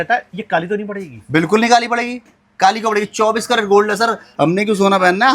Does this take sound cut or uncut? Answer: cut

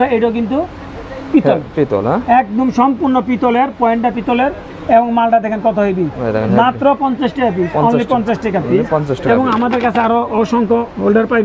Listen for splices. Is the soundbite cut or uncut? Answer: uncut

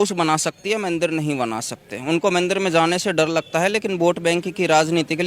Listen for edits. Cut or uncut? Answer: uncut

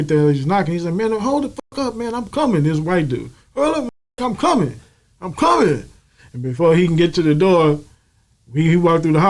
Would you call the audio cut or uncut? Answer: uncut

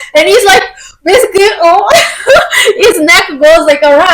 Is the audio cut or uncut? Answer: uncut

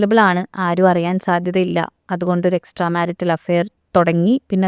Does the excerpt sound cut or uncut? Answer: uncut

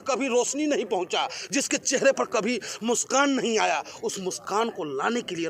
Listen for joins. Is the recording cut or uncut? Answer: uncut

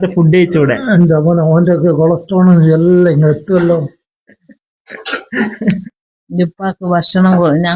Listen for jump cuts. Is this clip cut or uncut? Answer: cut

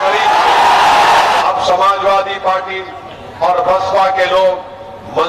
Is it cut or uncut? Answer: cut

